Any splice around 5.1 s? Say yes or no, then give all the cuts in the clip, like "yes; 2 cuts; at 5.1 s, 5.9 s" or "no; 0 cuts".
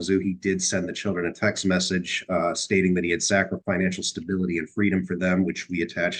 no; 1 cut; at 3.6 s